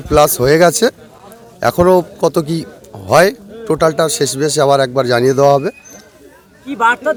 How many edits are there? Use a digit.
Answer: 0